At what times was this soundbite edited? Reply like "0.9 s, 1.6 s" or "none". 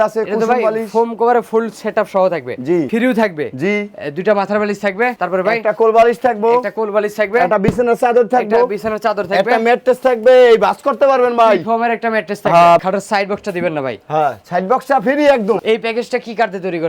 2.9 s, 5.2 s, 12.8 s, 15.6 s